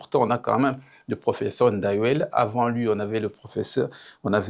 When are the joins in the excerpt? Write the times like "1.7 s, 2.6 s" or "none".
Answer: none

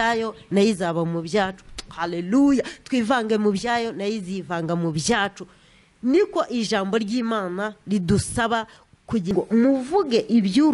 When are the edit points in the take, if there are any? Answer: 9.3 s

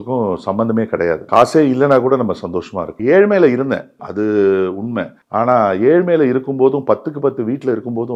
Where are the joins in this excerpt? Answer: none

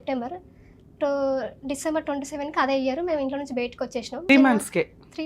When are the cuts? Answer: 4.3 s

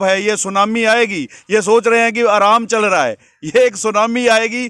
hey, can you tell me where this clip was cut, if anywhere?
none

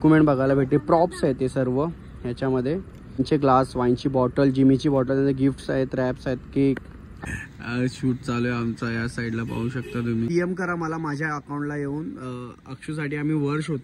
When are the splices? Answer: 3.2 s, 7.1 s, 10.3 s

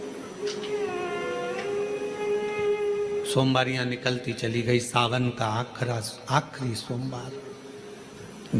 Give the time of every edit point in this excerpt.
none

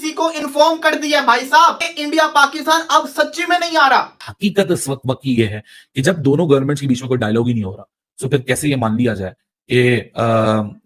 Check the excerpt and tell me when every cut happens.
4.2 s

